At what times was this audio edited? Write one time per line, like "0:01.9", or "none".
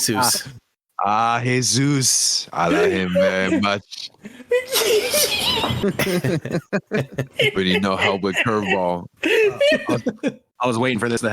0:05.8